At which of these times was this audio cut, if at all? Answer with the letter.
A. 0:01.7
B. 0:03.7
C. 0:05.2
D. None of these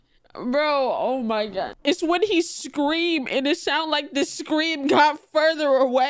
A